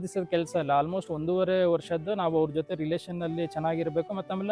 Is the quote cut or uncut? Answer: uncut